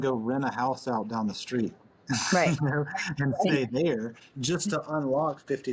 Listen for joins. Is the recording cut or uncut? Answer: uncut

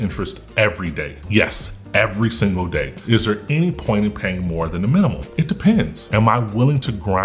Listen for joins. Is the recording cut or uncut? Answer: cut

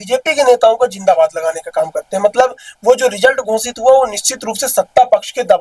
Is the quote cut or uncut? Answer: uncut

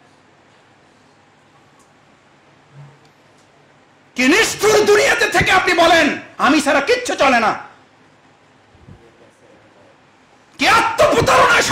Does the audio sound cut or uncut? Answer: uncut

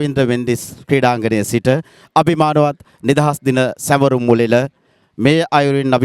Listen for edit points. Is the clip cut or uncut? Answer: uncut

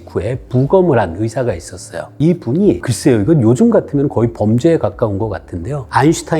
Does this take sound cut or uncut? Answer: cut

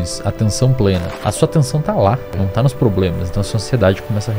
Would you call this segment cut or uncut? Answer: cut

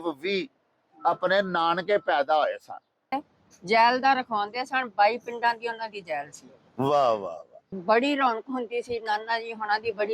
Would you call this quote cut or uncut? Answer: cut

